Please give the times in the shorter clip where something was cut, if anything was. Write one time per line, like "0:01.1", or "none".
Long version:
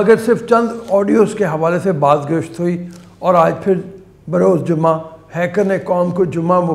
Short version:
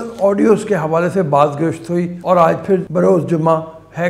0:02.1
0:02.9